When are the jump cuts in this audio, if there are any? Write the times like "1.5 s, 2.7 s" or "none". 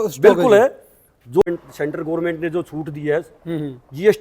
1.5 s